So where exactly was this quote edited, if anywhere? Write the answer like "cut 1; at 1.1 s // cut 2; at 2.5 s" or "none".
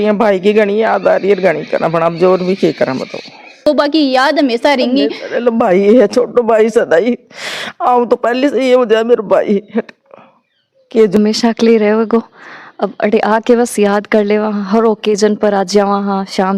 cut 1; at 3.6 s // cut 2; at 11.2 s